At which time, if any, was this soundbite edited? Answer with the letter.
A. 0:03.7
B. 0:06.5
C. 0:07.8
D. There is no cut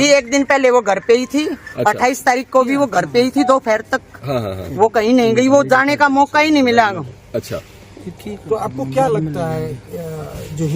D